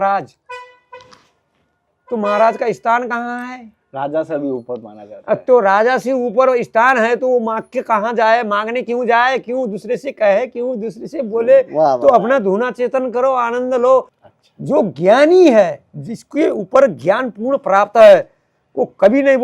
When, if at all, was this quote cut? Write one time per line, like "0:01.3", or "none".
0:14.2